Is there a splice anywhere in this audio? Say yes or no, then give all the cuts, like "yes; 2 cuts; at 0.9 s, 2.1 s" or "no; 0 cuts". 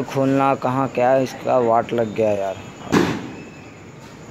no; 0 cuts